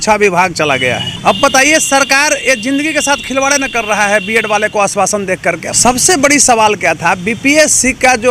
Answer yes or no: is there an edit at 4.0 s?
no